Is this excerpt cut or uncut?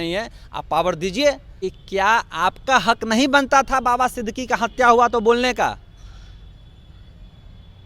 cut